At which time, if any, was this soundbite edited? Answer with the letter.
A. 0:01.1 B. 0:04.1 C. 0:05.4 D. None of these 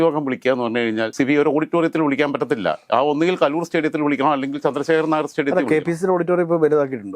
A